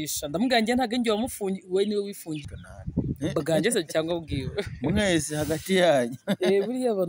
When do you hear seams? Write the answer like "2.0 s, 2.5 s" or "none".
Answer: 2.6 s